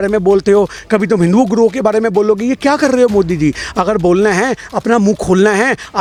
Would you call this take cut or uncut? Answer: uncut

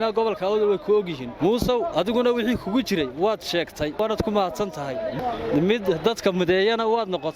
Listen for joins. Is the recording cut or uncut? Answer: cut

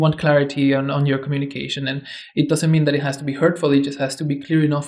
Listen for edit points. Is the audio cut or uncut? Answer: uncut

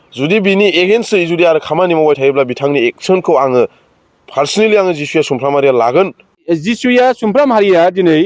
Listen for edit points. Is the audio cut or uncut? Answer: cut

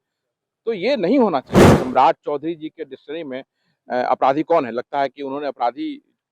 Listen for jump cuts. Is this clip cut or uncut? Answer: cut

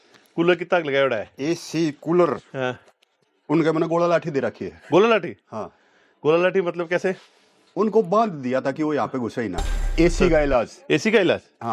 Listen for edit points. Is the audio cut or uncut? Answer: cut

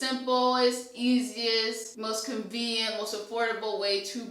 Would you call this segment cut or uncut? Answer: cut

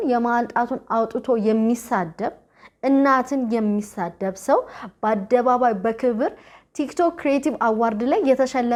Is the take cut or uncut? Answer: uncut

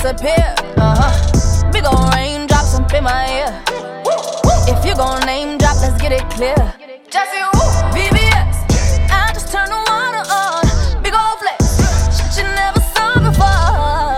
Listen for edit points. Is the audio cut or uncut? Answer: uncut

